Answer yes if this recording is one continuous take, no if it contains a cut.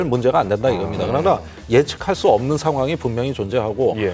yes